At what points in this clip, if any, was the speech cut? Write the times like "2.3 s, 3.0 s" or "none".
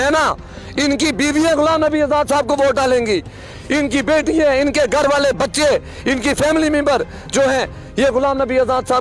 none